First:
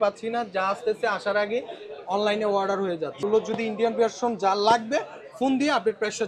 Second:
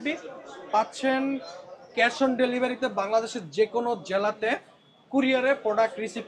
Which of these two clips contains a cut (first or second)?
first